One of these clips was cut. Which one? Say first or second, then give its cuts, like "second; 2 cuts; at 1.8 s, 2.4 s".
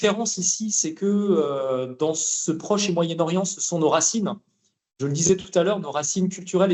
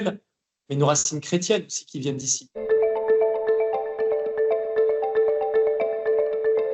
second; 1 cut; at 2.5 s